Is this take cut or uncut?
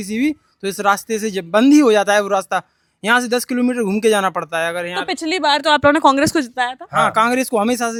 uncut